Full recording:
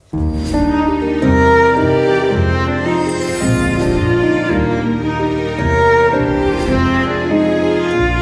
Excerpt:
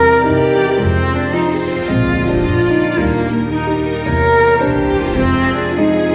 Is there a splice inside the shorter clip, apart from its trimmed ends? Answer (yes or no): no